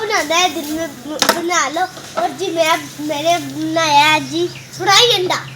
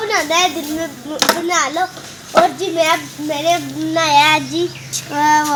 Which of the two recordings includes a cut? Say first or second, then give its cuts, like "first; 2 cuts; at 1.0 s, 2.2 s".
first; 2 cuts; at 2.1 s, 4.7 s